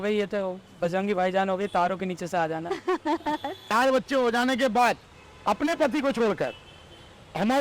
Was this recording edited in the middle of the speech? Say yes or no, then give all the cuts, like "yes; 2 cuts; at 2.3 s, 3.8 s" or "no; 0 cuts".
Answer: yes; 1 cut; at 3.7 s